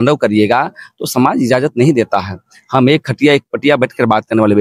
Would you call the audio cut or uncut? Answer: uncut